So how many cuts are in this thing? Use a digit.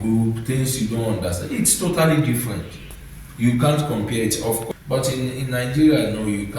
1